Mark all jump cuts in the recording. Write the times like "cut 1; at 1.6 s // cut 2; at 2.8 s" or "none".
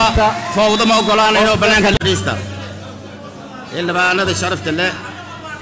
cut 1; at 2.0 s